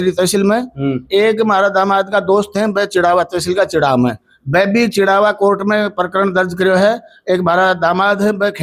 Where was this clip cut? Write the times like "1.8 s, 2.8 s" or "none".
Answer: none